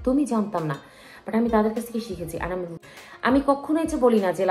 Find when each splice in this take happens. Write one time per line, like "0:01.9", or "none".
0:02.8